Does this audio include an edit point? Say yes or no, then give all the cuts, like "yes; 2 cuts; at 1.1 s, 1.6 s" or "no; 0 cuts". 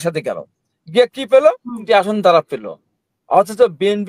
no; 0 cuts